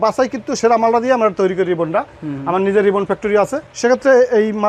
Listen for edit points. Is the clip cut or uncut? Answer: uncut